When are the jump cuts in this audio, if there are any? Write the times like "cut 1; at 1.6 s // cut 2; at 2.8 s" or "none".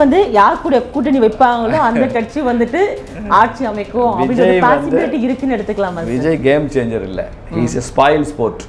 none